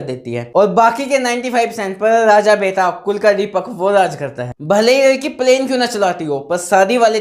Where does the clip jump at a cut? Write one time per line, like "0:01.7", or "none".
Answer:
0:04.5